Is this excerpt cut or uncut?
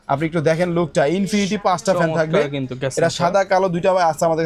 uncut